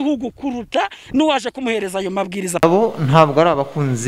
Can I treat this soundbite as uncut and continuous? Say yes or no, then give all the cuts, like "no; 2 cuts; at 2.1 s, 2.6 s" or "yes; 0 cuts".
no; 1 cut; at 2.6 s